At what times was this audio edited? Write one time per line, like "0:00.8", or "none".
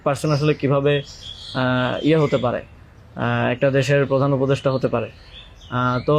none